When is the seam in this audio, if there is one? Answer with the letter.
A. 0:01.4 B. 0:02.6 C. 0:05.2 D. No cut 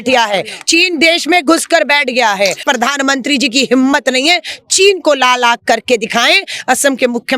B